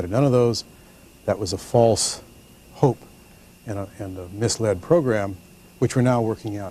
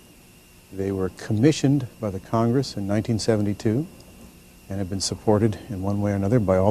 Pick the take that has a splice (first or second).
second